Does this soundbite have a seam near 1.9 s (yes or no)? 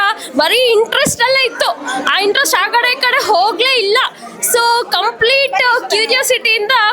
no